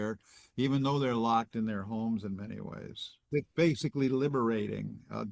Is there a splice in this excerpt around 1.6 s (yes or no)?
no